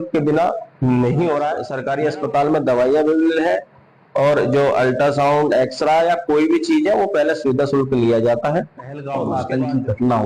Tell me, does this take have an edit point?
yes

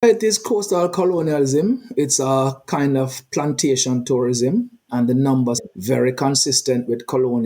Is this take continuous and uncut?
no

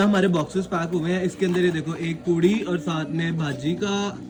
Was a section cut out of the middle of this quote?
no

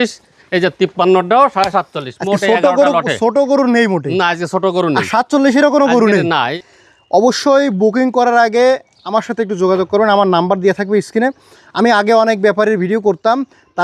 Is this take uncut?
no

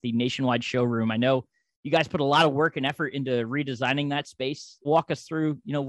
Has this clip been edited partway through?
yes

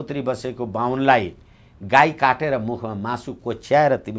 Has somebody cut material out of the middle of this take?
no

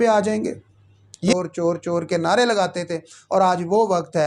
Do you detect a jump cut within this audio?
yes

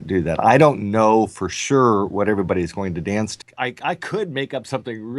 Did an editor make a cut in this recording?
yes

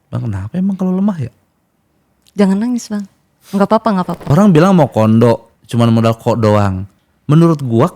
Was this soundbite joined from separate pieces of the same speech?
yes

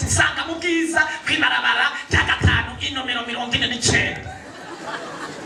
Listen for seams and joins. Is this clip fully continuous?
yes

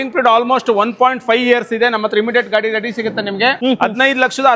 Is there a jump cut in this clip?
yes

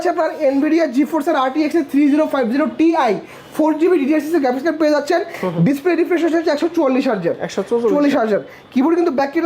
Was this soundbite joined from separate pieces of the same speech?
no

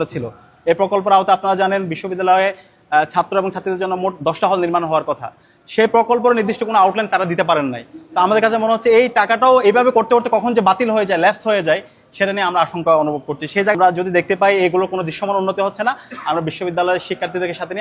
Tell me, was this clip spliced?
yes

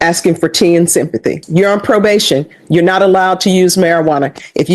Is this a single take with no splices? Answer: no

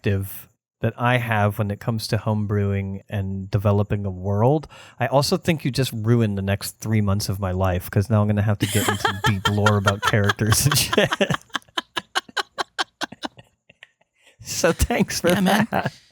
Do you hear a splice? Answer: yes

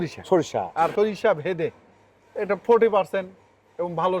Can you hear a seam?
yes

